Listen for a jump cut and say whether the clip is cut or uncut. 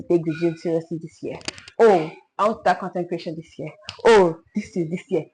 uncut